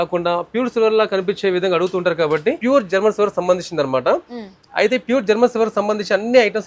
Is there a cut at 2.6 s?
yes; 1 cut; at 2.6 s

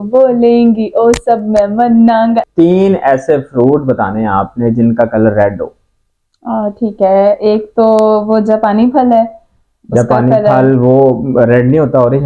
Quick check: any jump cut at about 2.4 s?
yes; 1 cut; at 2.4 s

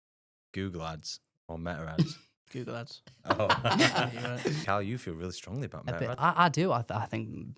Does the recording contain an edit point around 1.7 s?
no; 1 cut; at 4.6 s

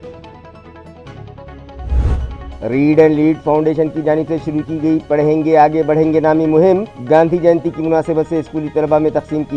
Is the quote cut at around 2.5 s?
yes; 1 cut; at 2.5 s

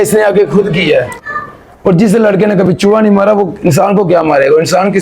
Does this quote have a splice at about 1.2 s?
yes; 1 cut; at 1.2 s

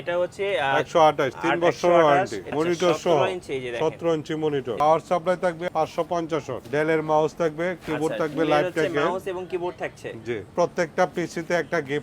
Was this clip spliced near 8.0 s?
no; 5 cuts; at 2.5 s, 4.8 s, 5.6 s, 6.6 s, 10.5 s

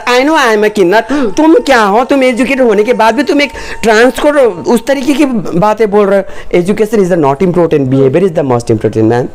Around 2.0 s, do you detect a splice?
no; 0 cuts

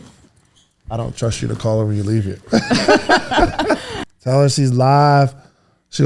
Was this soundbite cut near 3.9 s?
yes; 1 cut; at 3.9 s

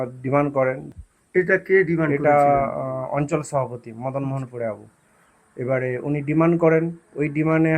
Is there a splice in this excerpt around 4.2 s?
no; 1 cut; at 0.9 s

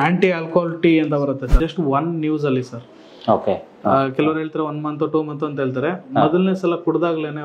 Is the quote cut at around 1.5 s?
yes; 1 cut; at 1.5 s

